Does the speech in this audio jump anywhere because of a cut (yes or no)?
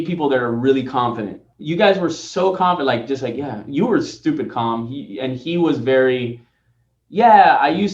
no